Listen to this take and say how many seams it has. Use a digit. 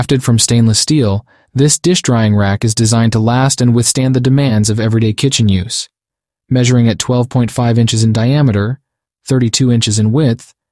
0